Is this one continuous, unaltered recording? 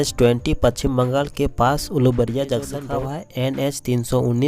no; 1 cut; at 2.9 s

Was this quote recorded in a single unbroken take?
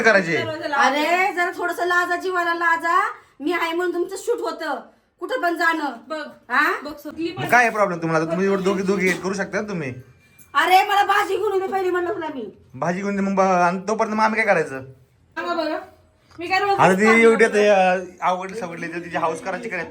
no; 2 cuts; at 7.1 s, 15.4 s

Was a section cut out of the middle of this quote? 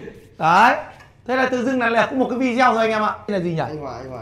yes; 1 cut; at 3.3 s

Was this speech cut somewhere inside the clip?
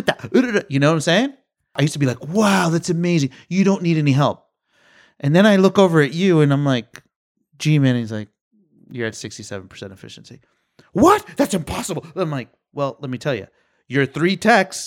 yes; 1 cut; at 1.8 s

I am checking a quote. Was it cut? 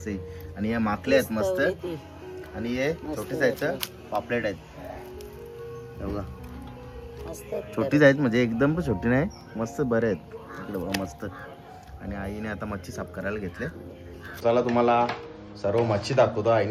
yes; 1 cut; at 14.3 s

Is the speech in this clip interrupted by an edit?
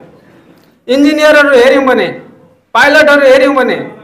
no; 0 cuts

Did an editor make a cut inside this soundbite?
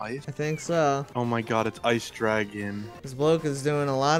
yes; 1 cut; at 1.1 s

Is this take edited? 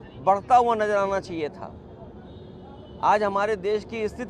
no; 0 cuts

